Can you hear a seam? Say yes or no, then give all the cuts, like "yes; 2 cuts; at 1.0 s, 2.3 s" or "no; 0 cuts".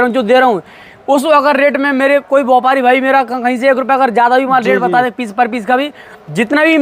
no; 0 cuts